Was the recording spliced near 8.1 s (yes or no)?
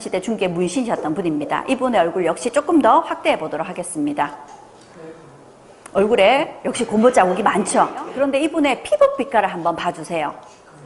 yes